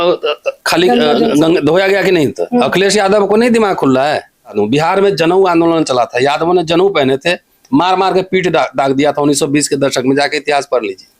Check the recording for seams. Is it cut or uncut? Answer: cut